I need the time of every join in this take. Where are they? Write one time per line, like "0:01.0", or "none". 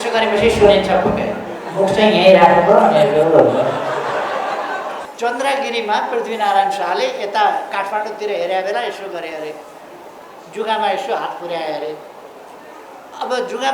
0:05.1